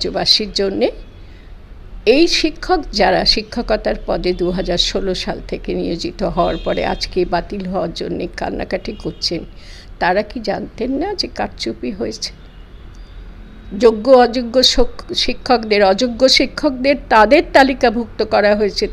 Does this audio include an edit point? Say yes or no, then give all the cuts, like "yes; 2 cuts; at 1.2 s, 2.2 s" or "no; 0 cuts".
no; 0 cuts